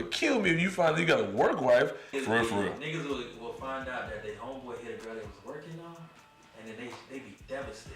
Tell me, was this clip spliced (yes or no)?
yes